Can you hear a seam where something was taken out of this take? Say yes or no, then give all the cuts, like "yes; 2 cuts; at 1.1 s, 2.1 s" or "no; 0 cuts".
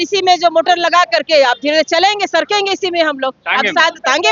no; 0 cuts